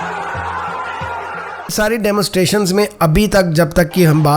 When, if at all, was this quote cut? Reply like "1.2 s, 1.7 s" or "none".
1.7 s

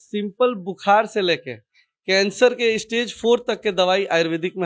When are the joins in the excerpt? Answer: none

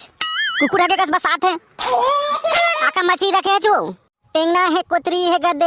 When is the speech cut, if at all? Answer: 2.8 s

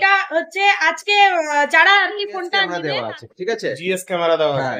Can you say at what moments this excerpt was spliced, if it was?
2.7 s

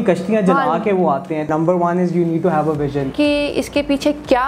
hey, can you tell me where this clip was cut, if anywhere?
1.5 s, 3.1 s

